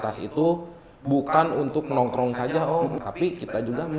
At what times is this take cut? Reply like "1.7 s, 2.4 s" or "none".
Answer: 3.0 s